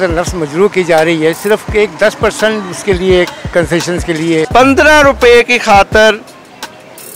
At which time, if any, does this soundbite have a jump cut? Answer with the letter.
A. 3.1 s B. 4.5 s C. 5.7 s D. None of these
B